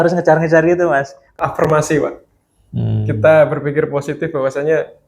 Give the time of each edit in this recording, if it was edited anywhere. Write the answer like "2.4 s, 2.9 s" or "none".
1.3 s